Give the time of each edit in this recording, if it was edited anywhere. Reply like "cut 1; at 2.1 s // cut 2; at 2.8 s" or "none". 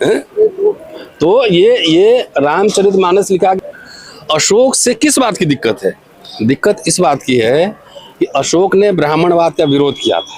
cut 1; at 3.6 s